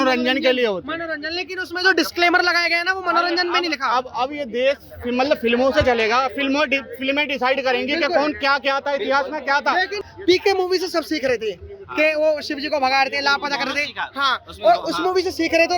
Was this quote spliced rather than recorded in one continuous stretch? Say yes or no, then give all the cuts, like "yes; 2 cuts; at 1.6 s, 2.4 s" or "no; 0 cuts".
yes; 1 cut; at 10.1 s